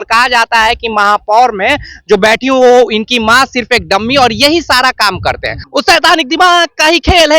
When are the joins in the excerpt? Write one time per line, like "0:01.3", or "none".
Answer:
0:05.5